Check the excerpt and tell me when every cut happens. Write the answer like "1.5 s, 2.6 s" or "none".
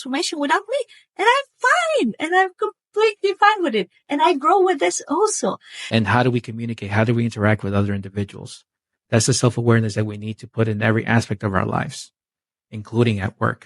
5.9 s